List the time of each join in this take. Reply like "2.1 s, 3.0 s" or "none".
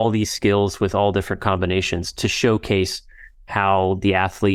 none